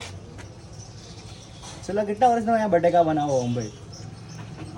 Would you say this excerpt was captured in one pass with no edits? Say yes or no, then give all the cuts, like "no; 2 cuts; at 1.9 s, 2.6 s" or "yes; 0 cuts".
yes; 0 cuts